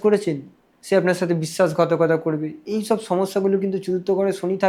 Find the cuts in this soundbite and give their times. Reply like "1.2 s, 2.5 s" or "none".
none